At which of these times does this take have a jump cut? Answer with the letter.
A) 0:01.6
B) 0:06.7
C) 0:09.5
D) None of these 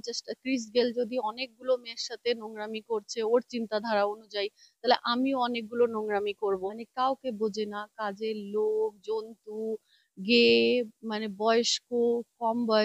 B